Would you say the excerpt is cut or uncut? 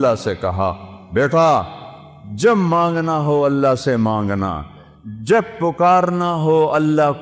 uncut